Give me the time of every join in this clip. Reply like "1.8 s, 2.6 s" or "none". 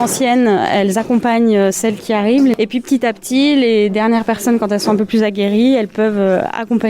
2.5 s